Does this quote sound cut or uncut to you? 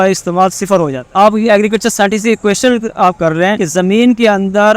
cut